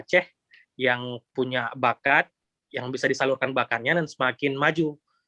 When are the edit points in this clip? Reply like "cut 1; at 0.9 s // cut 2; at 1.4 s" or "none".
none